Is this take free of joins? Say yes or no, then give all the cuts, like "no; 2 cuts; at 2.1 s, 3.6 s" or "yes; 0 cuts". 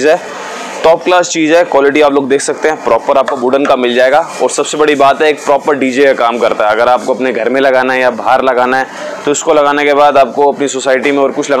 yes; 0 cuts